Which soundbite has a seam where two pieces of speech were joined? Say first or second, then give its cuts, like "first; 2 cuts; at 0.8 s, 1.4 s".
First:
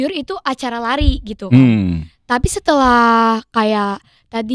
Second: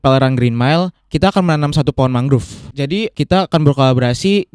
second; 1 cut; at 2.9 s